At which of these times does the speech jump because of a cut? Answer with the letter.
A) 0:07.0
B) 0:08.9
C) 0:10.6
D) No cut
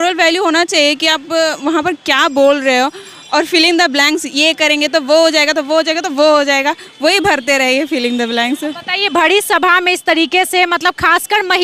D